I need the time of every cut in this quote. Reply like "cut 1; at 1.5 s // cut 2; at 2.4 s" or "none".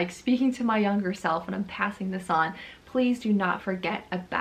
none